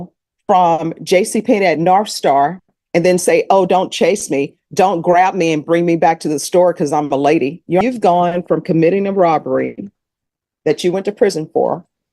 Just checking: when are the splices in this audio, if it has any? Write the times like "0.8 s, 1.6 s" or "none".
7.8 s